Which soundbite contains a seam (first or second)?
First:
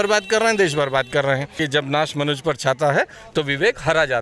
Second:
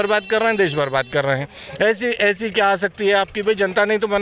first